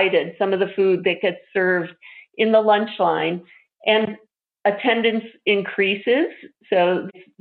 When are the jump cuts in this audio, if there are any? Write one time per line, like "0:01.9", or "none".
none